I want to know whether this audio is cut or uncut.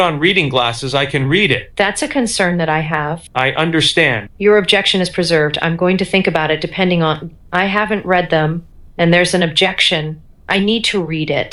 uncut